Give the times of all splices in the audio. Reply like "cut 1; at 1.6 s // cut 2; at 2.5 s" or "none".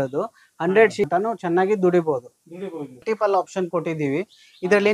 cut 1; at 1.1 s // cut 2; at 3.0 s